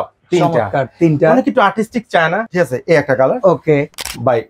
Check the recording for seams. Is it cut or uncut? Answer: cut